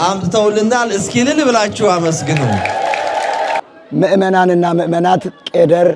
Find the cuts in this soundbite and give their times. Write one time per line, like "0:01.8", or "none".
0:03.6